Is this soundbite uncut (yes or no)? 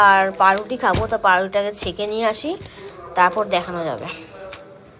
yes